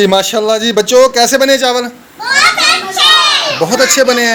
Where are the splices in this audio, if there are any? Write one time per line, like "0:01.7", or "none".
none

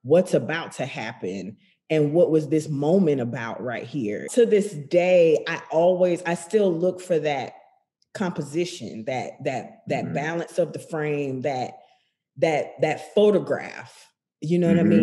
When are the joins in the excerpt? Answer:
0:04.2

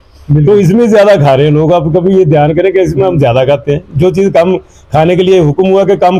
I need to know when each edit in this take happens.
none

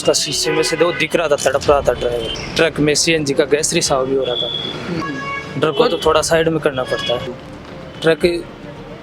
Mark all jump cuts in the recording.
0:02.4
0:05.0
0:07.3

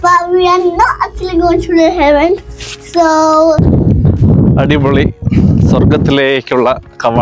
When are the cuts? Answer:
0:03.6

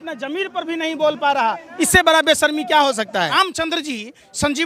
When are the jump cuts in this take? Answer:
0:03.3

